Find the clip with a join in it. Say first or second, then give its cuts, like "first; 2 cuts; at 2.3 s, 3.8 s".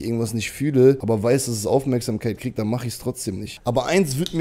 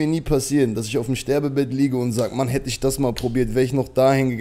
first; 2 cuts; at 1.0 s, 3.5 s